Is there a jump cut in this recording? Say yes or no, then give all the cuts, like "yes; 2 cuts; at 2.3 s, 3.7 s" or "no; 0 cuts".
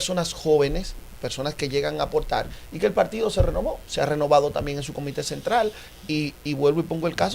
no; 0 cuts